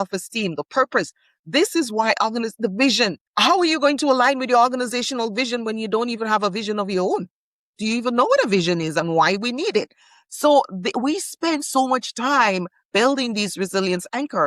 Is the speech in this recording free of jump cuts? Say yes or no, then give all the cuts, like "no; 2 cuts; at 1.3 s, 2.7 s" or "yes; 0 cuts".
no; 1 cut; at 3.2 s